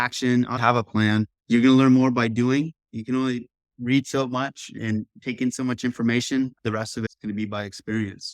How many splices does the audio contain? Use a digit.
1